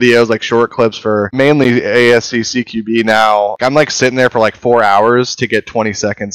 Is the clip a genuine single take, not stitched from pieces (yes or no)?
no